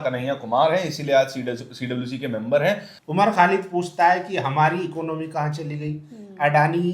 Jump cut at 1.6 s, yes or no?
no